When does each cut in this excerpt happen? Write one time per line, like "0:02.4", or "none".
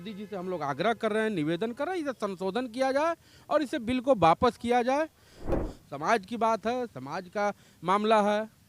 0:05.6